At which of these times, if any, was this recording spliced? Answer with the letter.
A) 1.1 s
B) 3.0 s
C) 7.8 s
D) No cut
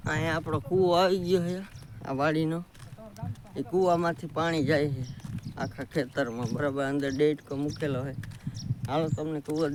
D